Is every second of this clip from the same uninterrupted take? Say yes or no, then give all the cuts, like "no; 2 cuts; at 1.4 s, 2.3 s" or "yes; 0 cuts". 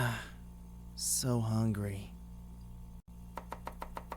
no; 1 cut; at 2.1 s